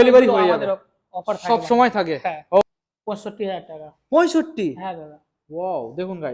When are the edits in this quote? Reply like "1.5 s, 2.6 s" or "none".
2.6 s